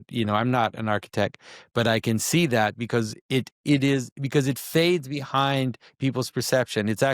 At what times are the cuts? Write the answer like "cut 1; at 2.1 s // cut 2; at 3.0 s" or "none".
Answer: none